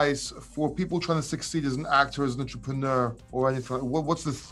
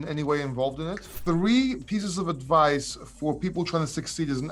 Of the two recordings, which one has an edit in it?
second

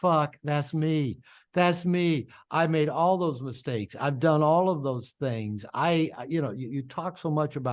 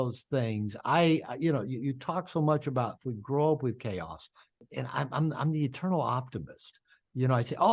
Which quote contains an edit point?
second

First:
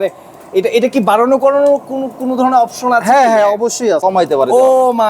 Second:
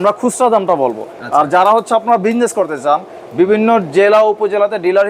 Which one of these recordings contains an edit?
first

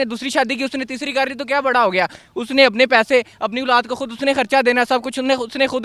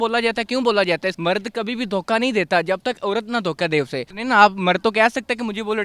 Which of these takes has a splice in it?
second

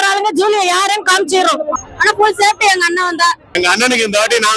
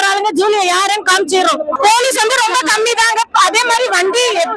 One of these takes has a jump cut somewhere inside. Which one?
first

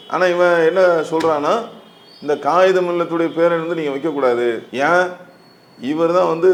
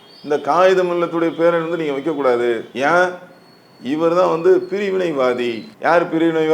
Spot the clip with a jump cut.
second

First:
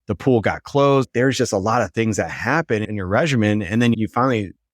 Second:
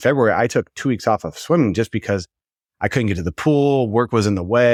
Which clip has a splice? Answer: first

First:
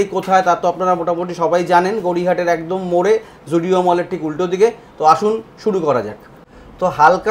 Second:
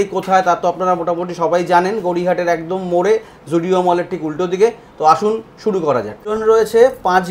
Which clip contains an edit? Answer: second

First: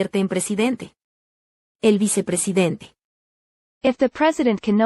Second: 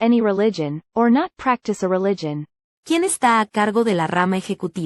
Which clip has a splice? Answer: second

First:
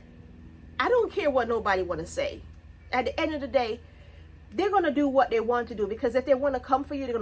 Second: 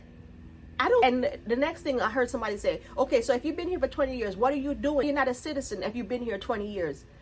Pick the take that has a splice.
second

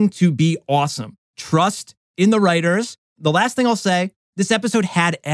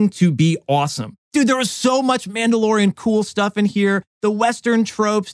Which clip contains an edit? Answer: second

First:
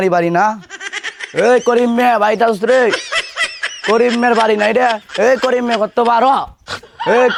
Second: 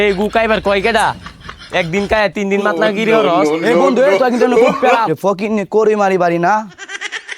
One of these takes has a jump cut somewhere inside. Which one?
second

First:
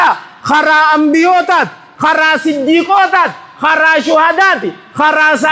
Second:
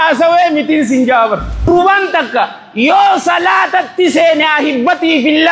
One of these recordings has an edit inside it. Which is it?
second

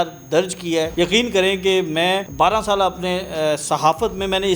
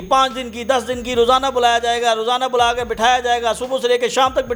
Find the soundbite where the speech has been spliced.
first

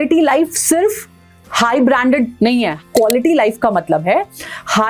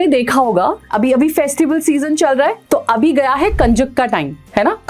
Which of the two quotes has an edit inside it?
second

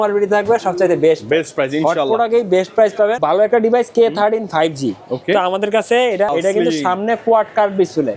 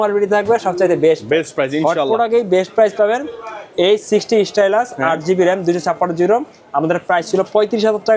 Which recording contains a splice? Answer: first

